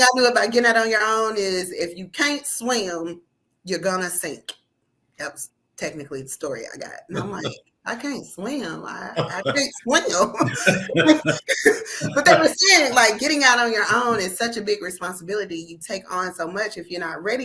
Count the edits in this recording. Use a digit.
0